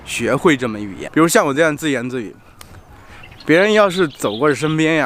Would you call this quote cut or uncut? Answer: cut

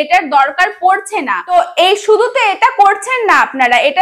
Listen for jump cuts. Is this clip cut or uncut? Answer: uncut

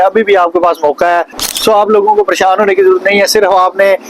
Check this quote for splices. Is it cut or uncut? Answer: cut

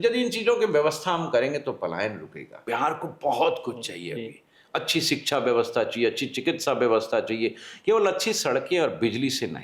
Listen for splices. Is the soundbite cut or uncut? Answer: cut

